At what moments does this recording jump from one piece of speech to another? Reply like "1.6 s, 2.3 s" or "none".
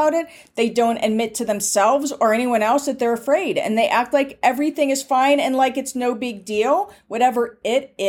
none

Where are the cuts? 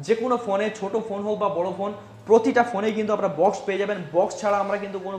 none

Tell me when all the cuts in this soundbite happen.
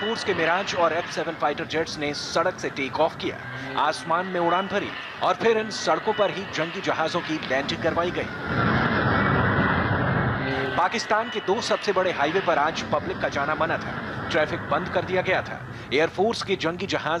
none

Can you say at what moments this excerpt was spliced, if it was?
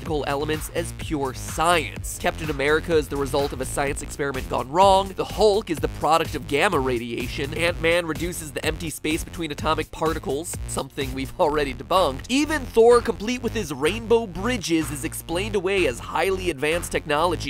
11.5 s

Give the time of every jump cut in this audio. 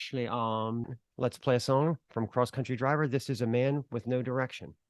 1.0 s

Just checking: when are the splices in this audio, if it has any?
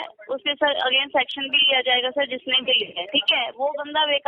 3.0 s

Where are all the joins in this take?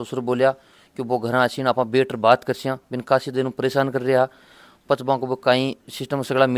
none

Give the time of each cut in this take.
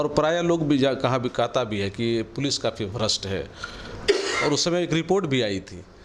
none

